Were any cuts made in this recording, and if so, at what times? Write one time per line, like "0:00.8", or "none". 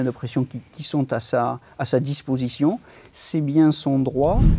none